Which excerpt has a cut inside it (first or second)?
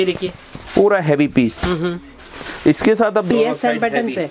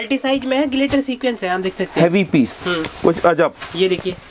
first